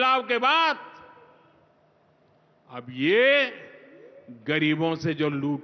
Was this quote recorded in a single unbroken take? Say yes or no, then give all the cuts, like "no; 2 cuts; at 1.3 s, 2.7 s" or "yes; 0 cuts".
yes; 0 cuts